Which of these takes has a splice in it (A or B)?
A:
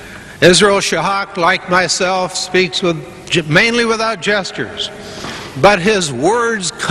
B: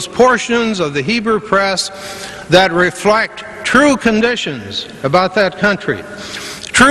A